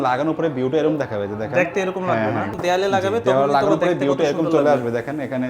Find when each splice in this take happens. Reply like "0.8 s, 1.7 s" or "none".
2.5 s